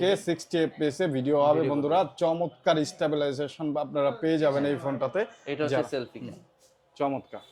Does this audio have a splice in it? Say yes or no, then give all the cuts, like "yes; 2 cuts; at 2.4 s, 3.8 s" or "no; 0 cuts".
no; 0 cuts